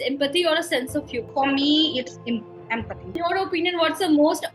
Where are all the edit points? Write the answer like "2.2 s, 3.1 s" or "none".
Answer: 1.3 s, 3.2 s